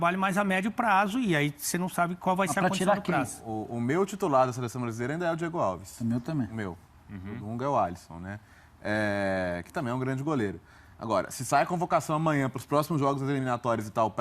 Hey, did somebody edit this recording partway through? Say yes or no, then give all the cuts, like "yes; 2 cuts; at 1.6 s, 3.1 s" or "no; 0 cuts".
yes; 1 cut; at 7.9 s